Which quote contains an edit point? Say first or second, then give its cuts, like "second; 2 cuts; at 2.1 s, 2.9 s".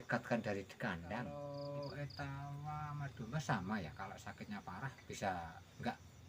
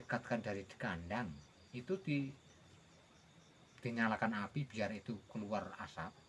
first; 1 cut; at 1.3 s